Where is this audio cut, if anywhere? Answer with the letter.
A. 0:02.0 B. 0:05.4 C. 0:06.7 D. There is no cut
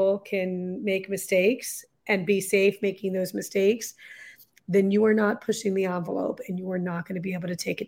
D